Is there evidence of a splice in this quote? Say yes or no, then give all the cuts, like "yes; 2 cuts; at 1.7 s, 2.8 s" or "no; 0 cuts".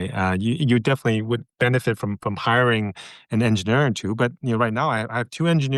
no; 0 cuts